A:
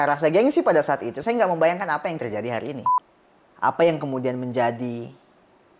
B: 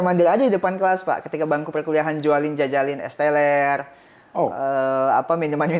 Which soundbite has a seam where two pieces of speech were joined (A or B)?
A